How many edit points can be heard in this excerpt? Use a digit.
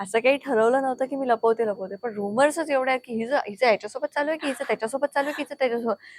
0